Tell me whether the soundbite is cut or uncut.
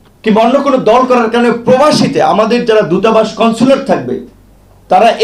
uncut